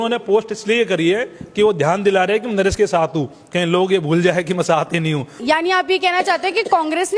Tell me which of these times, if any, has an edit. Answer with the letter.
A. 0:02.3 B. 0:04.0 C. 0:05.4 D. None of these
C